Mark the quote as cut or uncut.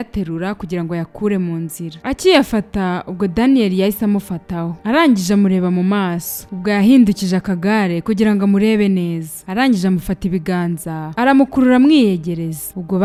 uncut